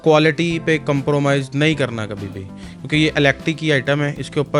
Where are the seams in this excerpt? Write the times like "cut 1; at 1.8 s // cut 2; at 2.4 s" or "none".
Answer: none